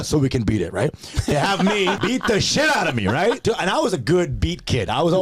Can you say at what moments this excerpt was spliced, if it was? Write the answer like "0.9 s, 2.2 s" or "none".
2.0 s, 3.4 s